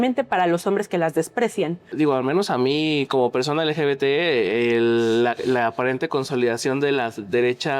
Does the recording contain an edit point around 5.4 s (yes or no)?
no